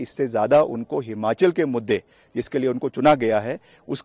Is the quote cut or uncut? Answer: uncut